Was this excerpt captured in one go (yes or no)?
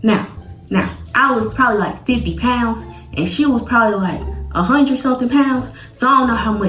yes